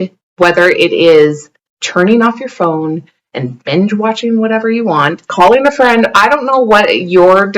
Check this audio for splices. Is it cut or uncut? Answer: cut